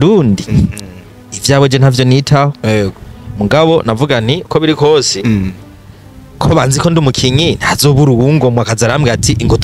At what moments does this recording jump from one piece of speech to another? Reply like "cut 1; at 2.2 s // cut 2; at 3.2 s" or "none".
none

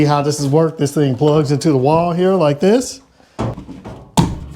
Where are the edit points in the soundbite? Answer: cut 1; at 3.7 s

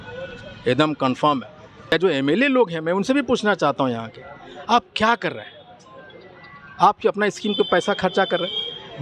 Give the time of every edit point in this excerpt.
cut 1; at 1.9 s

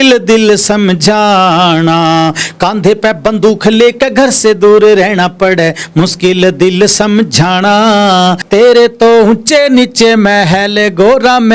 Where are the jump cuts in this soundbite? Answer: cut 1; at 8.4 s

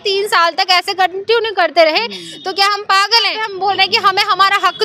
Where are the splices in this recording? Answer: cut 1; at 3.4 s

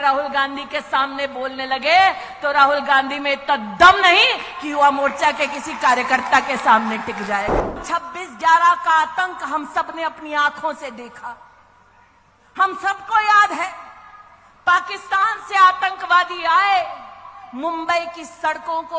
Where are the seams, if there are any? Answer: cut 1; at 7.8 s

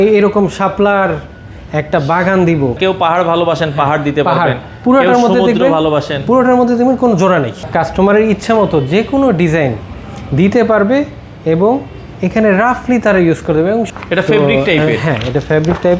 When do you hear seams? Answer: cut 1; at 2.8 s // cut 2; at 7.7 s // cut 3; at 13.9 s

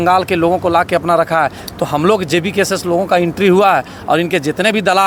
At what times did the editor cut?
none

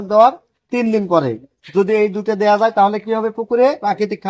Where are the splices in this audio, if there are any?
none

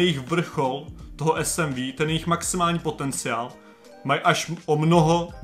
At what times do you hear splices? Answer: none

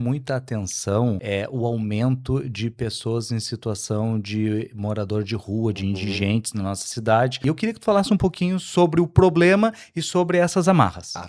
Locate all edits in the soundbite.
cut 1; at 1.2 s // cut 2; at 7.4 s

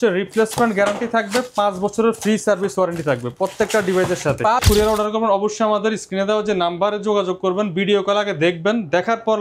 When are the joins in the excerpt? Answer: cut 1; at 4.6 s

